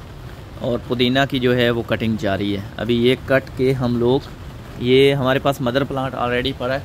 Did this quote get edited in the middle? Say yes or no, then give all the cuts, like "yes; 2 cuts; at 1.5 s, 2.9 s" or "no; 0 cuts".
no; 0 cuts